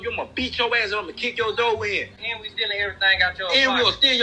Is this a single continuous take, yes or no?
yes